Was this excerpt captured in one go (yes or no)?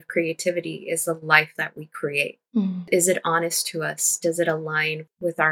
yes